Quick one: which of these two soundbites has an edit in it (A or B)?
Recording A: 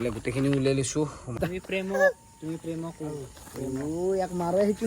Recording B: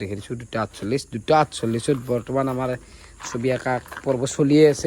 A